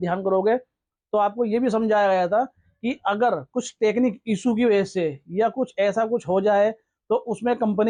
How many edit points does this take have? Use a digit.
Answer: 0